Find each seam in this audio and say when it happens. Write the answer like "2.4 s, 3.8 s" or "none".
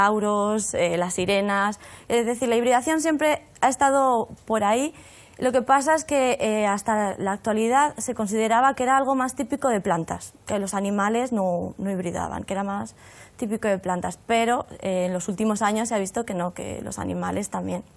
15.2 s